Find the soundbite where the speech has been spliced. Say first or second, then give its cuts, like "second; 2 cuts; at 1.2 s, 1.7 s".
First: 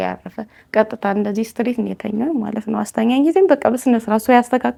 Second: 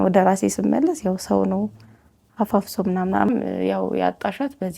second; 1 cut; at 3.3 s